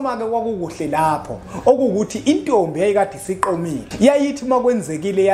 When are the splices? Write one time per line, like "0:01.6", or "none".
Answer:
0:03.8